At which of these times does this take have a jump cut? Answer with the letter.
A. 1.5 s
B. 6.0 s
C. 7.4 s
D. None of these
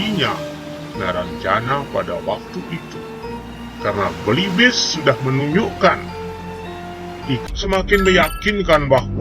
C